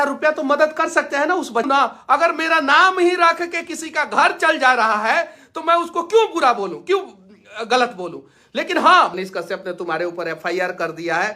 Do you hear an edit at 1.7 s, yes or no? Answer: yes